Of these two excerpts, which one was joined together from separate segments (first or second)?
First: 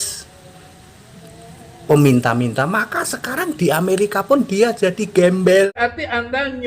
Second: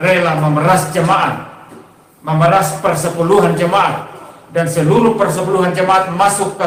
first